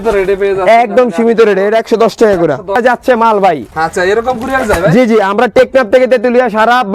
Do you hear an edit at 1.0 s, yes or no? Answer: no